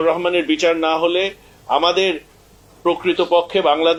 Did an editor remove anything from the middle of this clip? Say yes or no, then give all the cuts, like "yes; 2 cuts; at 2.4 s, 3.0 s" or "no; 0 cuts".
no; 0 cuts